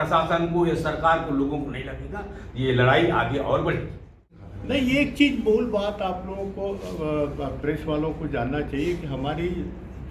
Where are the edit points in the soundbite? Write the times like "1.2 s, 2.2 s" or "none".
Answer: 4.0 s